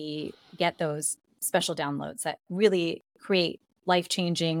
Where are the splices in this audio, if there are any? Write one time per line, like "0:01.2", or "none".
none